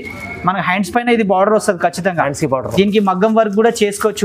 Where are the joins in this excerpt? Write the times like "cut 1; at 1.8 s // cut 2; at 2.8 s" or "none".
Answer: none